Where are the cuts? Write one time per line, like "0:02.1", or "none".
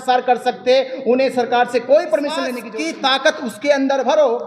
0:02.6